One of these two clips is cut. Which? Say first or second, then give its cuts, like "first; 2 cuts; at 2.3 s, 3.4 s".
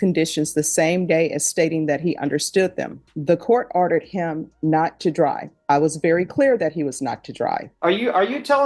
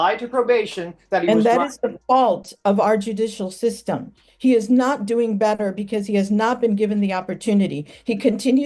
first; 2 cuts; at 3.0 s, 7.7 s